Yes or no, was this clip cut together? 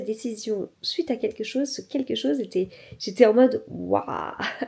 no